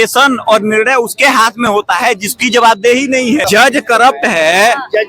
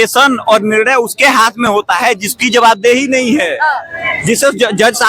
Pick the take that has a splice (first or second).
first